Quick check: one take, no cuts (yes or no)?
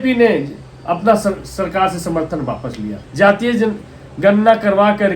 no